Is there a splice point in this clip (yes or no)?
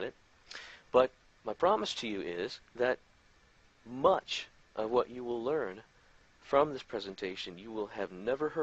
yes